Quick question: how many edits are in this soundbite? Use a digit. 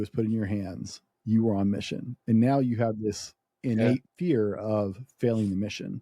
1